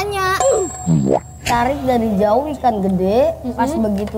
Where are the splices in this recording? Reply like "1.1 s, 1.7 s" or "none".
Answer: 1.4 s